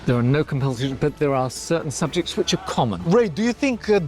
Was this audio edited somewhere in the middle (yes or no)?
yes